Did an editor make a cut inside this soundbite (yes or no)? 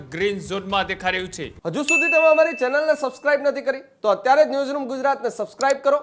yes